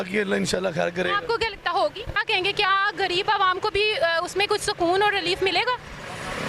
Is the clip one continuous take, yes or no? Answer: no